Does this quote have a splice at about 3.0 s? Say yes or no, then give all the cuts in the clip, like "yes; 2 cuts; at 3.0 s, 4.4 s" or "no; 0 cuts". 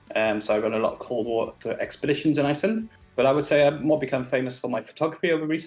yes; 1 cut; at 3.0 s